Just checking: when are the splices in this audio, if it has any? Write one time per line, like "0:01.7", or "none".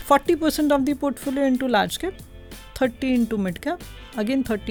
none